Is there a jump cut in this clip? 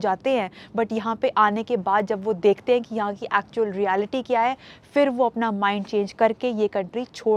no; 0 cuts

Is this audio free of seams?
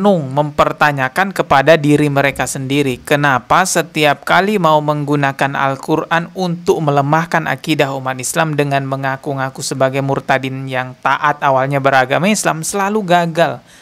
yes; 0 cuts

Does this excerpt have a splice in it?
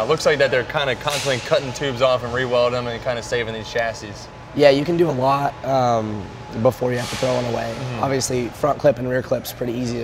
no; 0 cuts

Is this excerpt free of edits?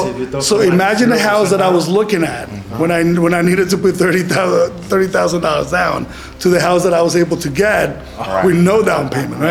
yes; 0 cuts

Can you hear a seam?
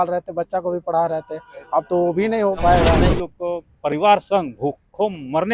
yes; 1 cut; at 3.0 s

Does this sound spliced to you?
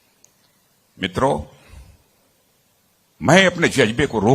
yes; 1 cut; at 2.5 s

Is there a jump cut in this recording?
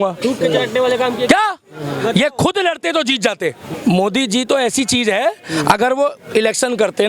yes; 1 cut; at 3.7 s

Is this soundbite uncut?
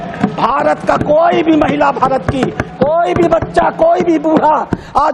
yes; 0 cuts

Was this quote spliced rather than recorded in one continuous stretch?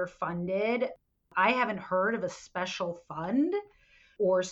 yes; 1 cut; at 1.3 s

